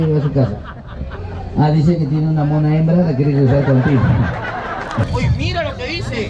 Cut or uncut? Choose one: cut